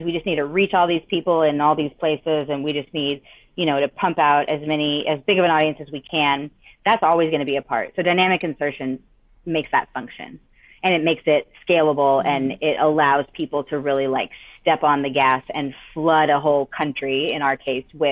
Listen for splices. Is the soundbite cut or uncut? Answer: uncut